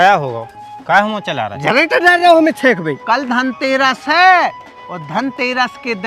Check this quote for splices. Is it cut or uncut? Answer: cut